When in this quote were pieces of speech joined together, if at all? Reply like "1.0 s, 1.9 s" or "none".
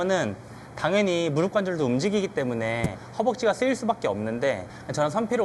none